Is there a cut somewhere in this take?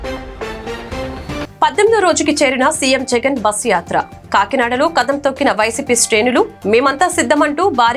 yes; 1 cut; at 1.5 s

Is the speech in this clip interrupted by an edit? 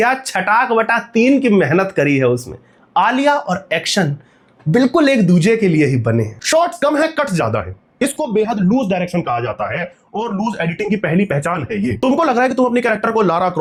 no; 0 cuts

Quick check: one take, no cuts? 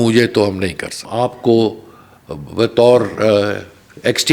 no; 1 cut; at 1.1 s

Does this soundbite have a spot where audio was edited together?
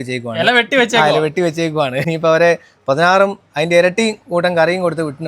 yes; 1 cut; at 2.0 s

